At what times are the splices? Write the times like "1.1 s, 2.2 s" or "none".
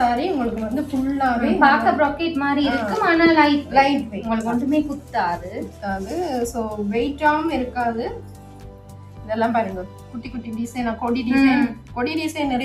none

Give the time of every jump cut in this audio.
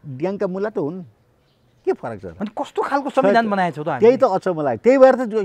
2.3 s

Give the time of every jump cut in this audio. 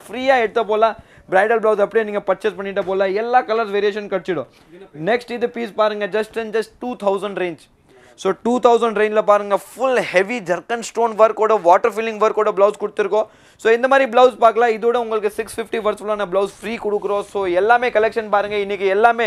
none

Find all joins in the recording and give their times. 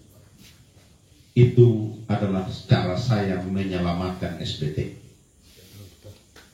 1.0 s

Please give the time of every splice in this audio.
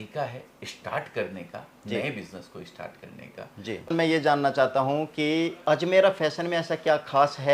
3.9 s

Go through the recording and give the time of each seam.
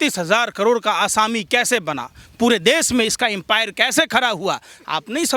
none

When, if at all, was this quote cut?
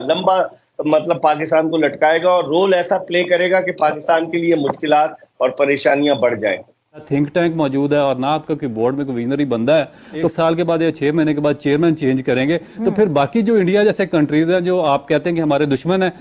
7.1 s, 10.3 s

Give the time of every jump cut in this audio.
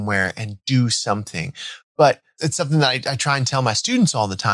2.3 s

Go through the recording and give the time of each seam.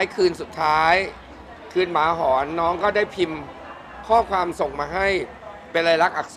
none

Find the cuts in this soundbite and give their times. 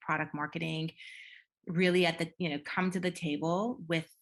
none

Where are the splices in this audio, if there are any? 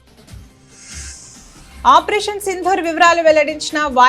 1.8 s

